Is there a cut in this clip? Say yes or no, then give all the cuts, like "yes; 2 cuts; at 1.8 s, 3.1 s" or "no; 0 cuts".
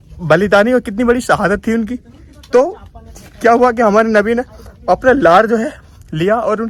no; 0 cuts